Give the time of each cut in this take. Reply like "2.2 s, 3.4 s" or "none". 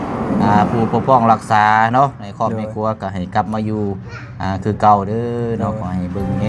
none